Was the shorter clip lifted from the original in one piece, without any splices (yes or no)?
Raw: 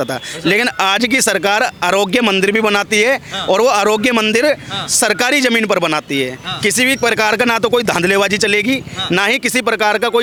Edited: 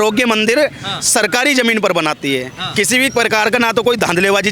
yes